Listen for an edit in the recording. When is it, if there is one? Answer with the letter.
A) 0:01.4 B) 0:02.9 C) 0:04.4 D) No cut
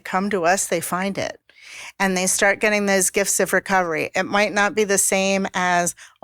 D